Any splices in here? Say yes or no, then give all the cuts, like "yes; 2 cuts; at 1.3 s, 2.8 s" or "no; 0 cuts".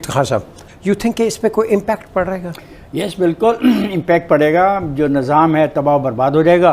no; 0 cuts